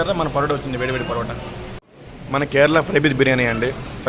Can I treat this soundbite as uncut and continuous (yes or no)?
no